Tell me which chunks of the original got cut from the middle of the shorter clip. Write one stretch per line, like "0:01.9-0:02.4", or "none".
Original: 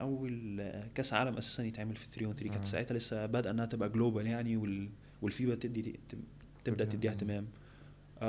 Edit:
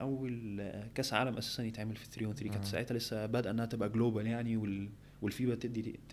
none

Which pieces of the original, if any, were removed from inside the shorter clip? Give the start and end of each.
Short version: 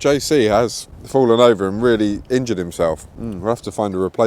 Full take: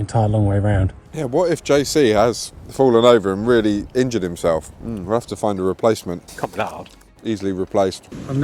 none

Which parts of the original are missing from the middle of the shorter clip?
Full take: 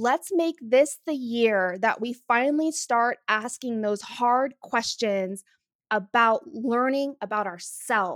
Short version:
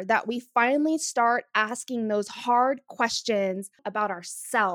0:05.6-0:07.2

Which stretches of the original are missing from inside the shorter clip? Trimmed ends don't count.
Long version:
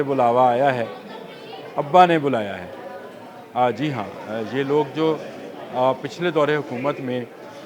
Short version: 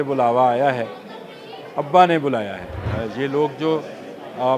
0:02.8-0:04.2

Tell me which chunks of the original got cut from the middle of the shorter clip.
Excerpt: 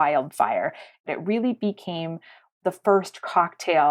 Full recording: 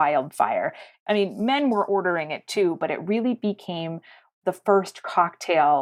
0:01.0-0:02.8

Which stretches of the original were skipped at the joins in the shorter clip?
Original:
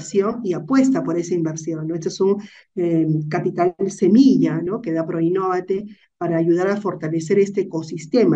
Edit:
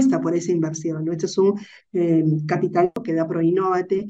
0:03.8-0:04.8

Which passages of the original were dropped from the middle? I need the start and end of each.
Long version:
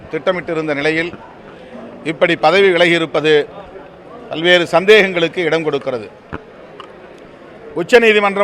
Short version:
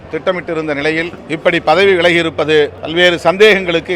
0:01.2-0:01.9
0:03.6-0:04.3

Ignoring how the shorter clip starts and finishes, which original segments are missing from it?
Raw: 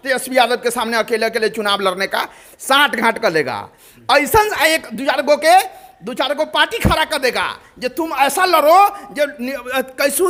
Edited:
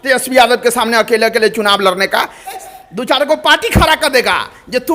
0:02.6-0:05.7

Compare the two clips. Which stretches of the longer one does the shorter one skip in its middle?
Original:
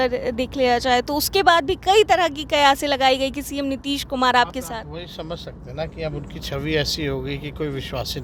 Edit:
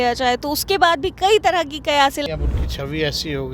0:02.9-0:06.0

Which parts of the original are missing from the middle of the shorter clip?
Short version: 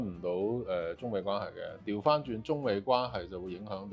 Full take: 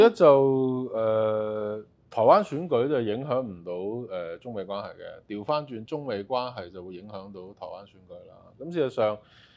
none

